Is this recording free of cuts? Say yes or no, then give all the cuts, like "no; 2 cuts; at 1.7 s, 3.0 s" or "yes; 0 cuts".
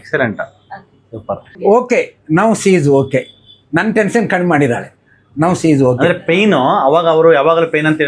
no; 1 cut; at 1.5 s